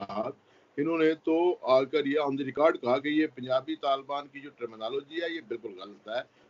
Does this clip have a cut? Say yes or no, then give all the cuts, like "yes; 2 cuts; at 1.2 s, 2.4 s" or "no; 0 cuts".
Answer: no; 0 cuts